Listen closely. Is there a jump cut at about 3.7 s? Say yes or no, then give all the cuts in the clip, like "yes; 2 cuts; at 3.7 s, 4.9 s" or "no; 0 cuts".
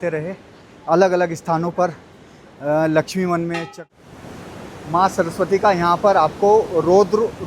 yes; 1 cut; at 3.7 s